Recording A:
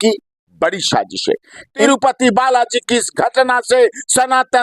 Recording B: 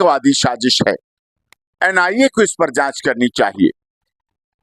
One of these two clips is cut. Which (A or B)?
A